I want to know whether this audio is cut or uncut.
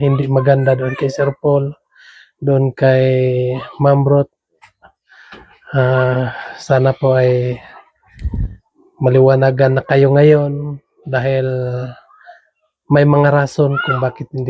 uncut